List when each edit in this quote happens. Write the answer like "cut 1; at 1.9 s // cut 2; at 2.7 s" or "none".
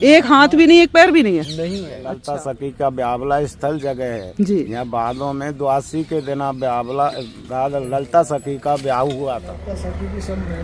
cut 1; at 2.1 s // cut 2; at 9.5 s